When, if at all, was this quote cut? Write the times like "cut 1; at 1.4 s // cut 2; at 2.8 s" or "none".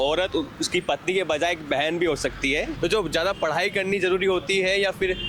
cut 1; at 2.7 s